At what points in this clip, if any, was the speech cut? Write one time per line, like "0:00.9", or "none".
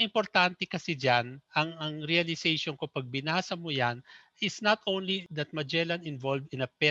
0:05.3